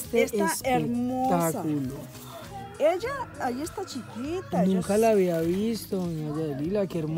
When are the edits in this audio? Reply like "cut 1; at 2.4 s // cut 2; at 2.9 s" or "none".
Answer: none